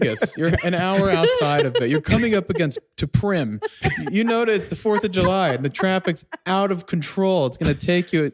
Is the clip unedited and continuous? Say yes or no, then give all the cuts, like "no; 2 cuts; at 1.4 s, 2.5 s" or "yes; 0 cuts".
yes; 0 cuts